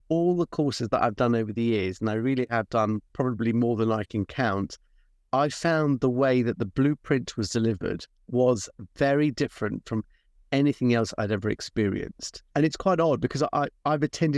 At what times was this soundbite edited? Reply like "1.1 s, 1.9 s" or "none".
3.1 s, 8.1 s, 12.4 s